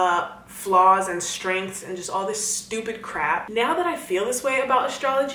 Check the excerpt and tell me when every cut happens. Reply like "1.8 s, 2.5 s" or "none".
3.5 s